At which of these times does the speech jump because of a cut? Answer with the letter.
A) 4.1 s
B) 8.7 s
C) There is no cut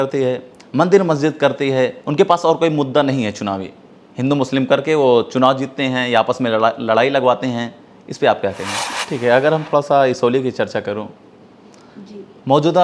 B